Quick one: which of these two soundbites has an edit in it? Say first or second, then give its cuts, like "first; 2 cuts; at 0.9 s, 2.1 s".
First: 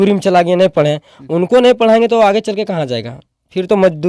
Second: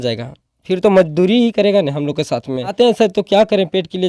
second; 1 cut; at 2.7 s